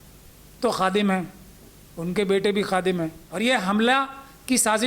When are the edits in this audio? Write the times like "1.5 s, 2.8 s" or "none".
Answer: 3.2 s